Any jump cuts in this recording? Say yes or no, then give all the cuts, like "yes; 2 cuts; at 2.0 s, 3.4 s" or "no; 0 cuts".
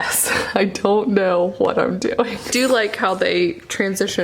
yes; 1 cut; at 2.5 s